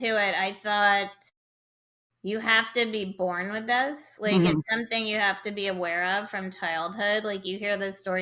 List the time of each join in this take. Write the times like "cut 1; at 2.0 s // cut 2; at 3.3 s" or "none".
none

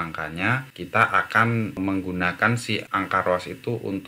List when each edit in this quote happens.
cut 1; at 2.9 s

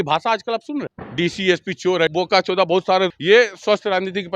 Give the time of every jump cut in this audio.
cut 1; at 1.0 s // cut 2; at 2.1 s // cut 3; at 3.2 s

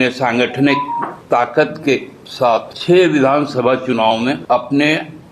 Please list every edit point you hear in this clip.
cut 1; at 1.2 s // cut 2; at 2.7 s // cut 3; at 4.4 s

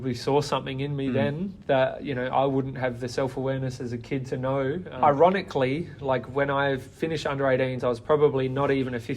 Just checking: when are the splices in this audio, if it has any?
cut 1; at 4.9 s

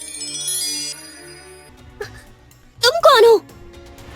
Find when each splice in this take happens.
cut 1; at 1.7 s

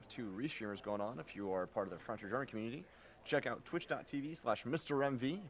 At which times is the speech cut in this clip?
cut 1; at 4.1 s

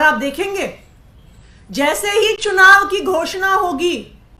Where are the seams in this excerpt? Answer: none

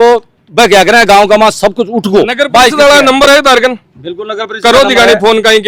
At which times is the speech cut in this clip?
none

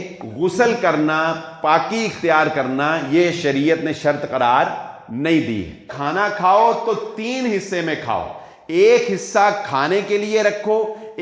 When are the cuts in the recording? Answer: cut 1; at 5.9 s

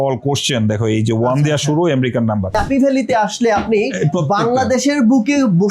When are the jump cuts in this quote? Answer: cut 1; at 2.6 s

